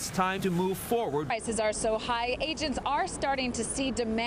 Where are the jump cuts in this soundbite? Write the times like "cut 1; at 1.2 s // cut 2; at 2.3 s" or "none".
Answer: cut 1; at 1.3 s